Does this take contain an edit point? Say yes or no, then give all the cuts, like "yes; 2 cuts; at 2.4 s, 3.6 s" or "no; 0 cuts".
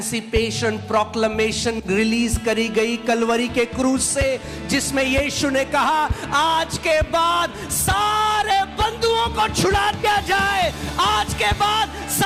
no; 0 cuts